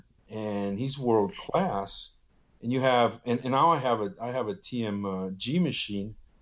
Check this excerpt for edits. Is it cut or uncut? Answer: uncut